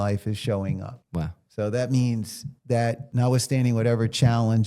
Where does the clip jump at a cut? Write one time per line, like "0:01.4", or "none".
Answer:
0:01.2
0:03.0